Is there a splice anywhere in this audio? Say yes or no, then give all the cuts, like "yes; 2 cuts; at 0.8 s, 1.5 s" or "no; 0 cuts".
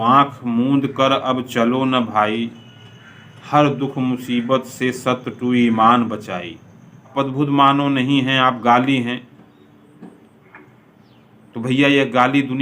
yes; 1 cut; at 7.1 s